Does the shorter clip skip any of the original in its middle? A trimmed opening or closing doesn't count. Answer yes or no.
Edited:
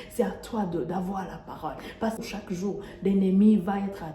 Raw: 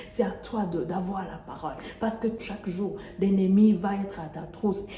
yes